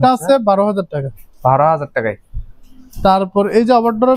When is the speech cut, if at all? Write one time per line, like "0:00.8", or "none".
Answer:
none